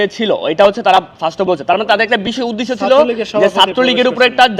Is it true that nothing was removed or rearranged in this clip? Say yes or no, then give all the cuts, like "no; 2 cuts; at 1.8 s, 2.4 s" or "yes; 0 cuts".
yes; 0 cuts